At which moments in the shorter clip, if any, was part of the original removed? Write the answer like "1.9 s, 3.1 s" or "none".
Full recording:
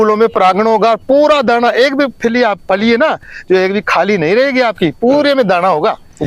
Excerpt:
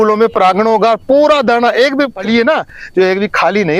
2.2 s